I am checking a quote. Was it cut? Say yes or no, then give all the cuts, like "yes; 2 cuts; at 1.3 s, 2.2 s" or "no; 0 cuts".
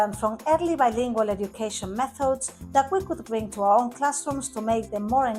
no; 0 cuts